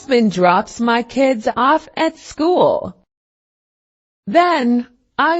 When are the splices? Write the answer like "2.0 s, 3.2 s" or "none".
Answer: 2.8 s